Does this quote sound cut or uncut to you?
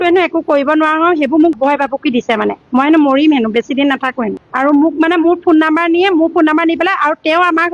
uncut